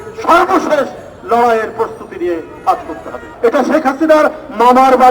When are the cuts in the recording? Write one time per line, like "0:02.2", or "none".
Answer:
0:03.3